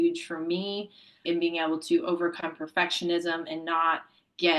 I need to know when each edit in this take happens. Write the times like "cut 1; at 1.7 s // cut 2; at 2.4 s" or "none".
cut 1; at 1.2 s